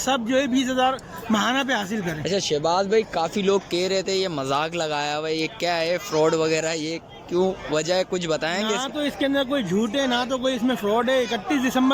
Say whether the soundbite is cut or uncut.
uncut